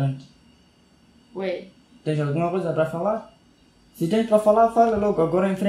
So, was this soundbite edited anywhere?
no; 0 cuts

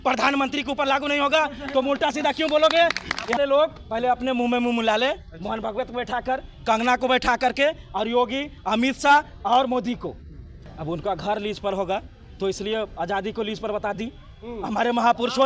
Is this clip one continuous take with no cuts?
no; 2 cuts; at 3.4 s, 10.6 s

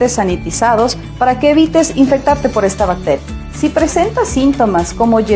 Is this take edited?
no; 0 cuts

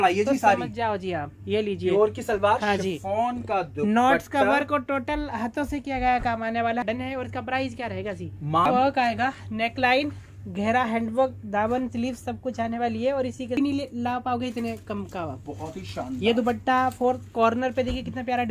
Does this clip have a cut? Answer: yes; 3 cuts; at 6.8 s, 8.7 s, 13.6 s

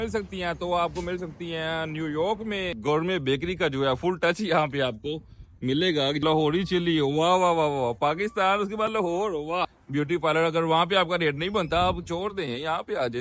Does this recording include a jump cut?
yes; 3 cuts; at 2.8 s, 6.2 s, 9.8 s

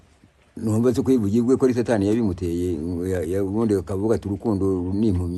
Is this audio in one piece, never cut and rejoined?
yes; 0 cuts

